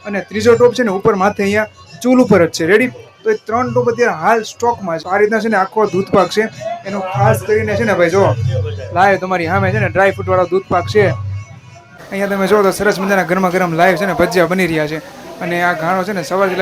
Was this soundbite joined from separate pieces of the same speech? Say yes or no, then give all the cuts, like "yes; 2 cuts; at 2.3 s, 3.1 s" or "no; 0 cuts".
yes; 2 cuts; at 5.0 s, 11.9 s